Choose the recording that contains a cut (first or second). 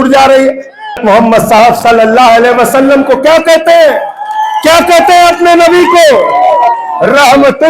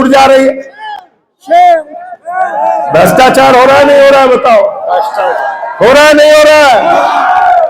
first